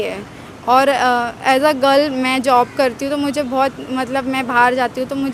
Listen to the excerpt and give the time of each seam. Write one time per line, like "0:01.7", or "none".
none